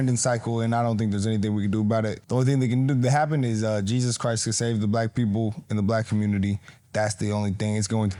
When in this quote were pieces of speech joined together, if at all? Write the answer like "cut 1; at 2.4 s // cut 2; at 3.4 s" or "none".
none